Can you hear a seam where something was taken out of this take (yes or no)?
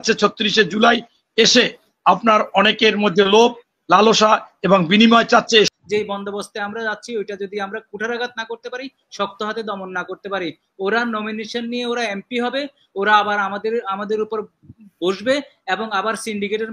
yes